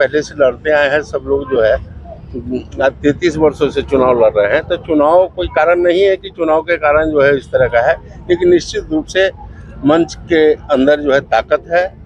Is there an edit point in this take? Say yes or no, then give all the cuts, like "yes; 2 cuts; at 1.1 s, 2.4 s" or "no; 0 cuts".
no; 0 cuts